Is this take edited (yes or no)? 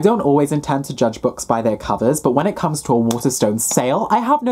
no